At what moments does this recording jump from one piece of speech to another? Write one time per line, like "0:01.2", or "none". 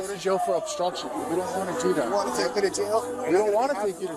none